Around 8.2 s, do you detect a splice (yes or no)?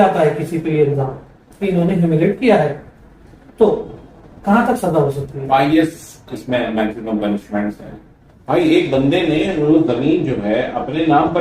yes